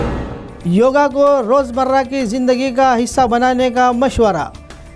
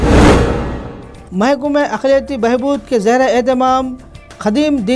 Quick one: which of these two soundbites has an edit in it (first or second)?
second